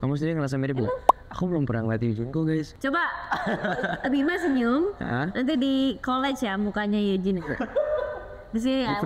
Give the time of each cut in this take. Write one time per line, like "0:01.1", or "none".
none